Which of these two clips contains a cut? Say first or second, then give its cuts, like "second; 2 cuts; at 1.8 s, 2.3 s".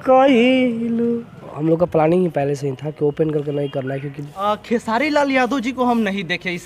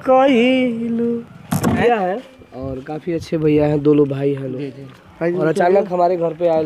first; 2 cuts; at 1.4 s, 4.2 s